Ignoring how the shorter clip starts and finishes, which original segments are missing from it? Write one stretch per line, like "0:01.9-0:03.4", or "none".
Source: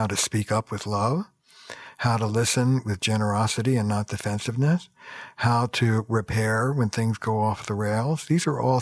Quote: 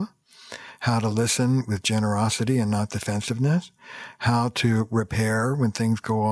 none